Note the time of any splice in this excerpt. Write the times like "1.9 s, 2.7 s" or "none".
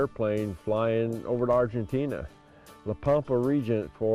none